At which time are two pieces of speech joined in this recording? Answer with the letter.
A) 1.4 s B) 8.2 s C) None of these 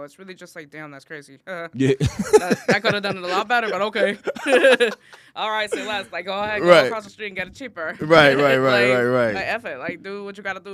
C